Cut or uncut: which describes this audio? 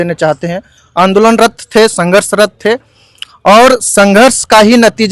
uncut